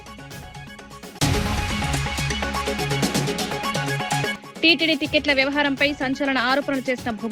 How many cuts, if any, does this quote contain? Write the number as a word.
three